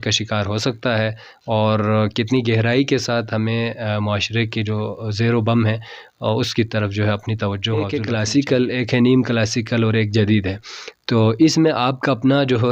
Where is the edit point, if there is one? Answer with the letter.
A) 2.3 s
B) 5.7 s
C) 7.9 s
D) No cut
C